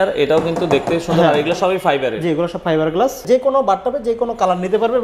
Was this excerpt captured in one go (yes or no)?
no